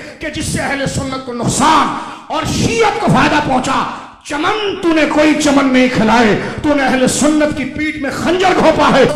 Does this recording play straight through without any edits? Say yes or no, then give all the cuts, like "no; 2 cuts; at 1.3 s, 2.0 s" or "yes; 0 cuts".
yes; 0 cuts